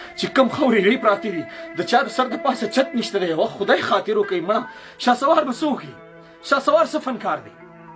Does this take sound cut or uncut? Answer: uncut